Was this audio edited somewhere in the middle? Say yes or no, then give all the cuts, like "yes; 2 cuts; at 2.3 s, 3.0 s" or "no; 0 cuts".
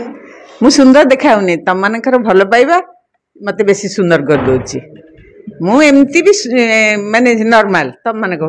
no; 0 cuts